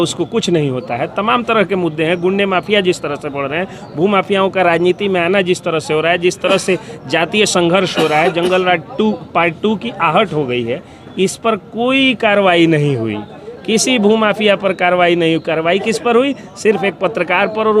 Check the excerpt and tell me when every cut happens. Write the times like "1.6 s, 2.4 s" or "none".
none